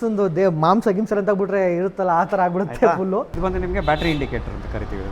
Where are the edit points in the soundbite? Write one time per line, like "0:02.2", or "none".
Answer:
0:03.3